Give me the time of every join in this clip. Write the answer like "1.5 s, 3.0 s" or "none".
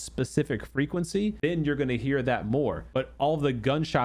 1.4 s, 2.8 s